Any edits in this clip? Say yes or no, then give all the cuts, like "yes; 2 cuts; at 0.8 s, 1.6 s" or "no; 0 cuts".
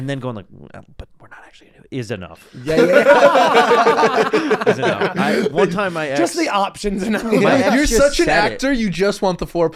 no; 0 cuts